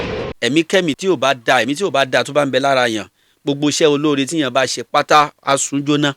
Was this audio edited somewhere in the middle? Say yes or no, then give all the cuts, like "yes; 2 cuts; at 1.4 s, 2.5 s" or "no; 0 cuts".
yes; 1 cut; at 1.0 s